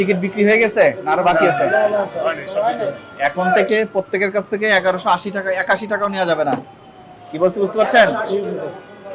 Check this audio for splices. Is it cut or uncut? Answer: uncut